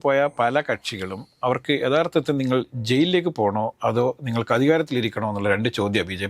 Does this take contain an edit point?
no; 0 cuts

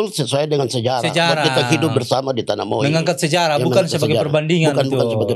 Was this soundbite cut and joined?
no; 0 cuts

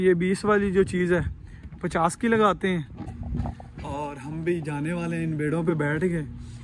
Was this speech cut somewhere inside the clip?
yes; 1 cut; at 3.2 s

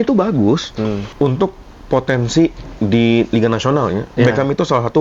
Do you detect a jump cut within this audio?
yes; 1 cut; at 1.1 s

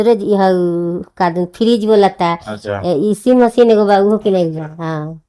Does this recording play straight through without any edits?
yes; 0 cuts

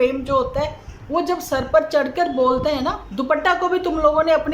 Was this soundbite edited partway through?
yes; 1 cut; at 3.0 s

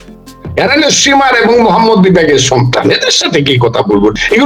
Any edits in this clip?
no; 0 cuts

